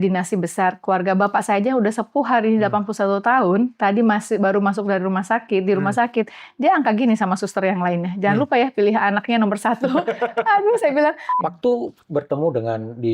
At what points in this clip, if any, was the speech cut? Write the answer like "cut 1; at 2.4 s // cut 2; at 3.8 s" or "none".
cut 1; at 11.3 s